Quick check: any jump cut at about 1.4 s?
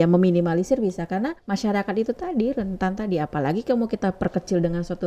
yes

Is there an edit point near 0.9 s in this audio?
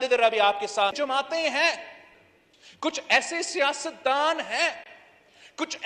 yes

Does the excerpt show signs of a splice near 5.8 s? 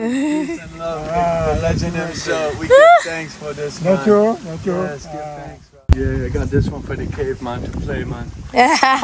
yes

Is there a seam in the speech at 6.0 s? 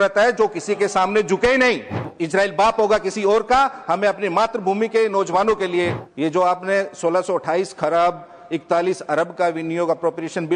yes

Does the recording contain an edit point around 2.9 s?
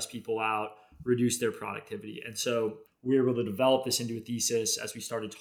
yes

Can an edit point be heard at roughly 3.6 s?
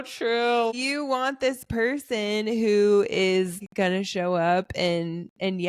yes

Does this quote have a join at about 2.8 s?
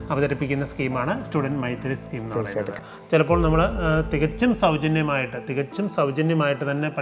yes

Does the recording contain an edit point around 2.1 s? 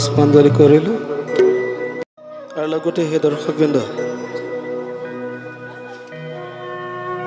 yes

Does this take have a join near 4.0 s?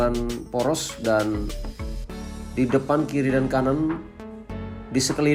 no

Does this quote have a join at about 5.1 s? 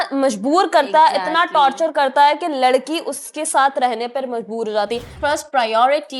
yes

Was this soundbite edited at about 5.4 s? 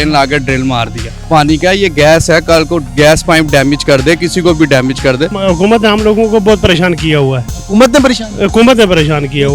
yes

